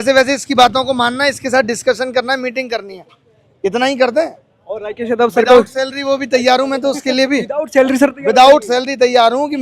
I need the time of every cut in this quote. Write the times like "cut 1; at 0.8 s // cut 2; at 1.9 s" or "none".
none

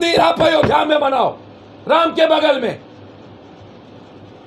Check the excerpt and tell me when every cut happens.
none

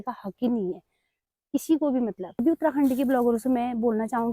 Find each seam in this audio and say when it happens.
cut 1; at 2.4 s

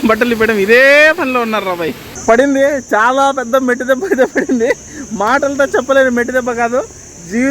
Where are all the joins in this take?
cut 1; at 2.1 s

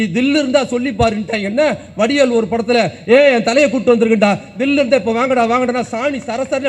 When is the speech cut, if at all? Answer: none

